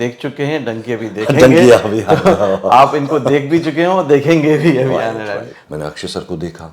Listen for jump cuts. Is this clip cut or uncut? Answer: cut